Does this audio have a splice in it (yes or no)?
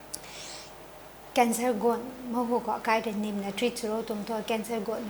no